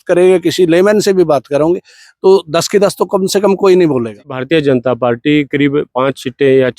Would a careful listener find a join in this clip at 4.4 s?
yes; 1 cut; at 4.4 s

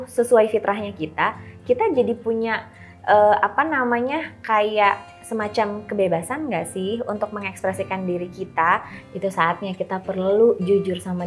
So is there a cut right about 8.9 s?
yes; 1 cut; at 8.9 s

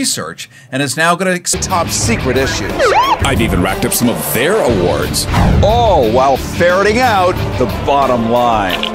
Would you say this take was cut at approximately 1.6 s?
no; 0 cuts

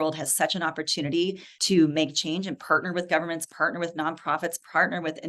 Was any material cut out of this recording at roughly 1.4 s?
no; 0 cuts

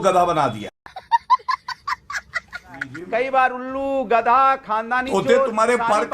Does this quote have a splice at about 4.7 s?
no; 1 cut; at 3.0 s

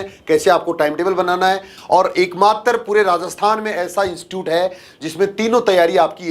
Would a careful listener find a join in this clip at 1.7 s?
yes; 1 cut; at 1.7 s

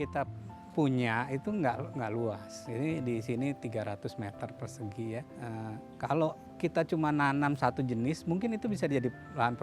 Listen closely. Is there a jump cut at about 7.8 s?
no; 1 cut; at 5.3 s

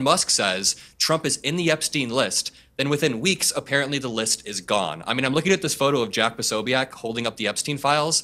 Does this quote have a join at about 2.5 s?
no; 0 cuts

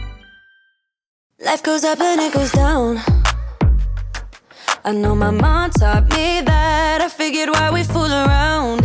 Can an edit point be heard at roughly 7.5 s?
no; 1 cut; at 1.4 s

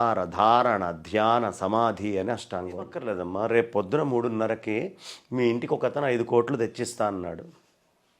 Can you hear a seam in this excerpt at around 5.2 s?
no; 1 cut; at 3.0 s

